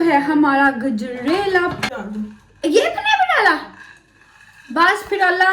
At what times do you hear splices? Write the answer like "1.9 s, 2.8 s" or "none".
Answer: 1.9 s